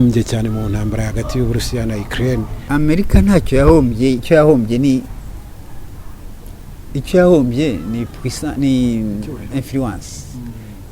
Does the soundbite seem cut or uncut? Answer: cut